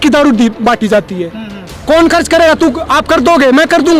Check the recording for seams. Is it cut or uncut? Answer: uncut